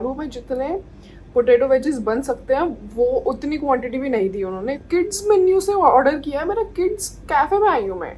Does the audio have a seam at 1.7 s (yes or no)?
no